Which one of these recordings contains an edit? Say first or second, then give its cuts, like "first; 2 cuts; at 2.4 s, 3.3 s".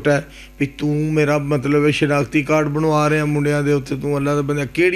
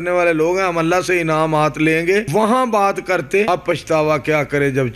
second; 2 cuts; at 2.3 s, 3.5 s